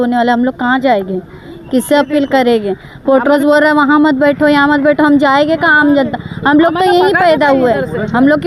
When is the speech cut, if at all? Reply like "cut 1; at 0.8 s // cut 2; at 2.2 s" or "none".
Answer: none